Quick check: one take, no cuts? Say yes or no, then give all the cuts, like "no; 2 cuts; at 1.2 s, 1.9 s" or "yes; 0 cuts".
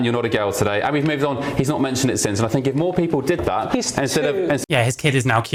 yes; 0 cuts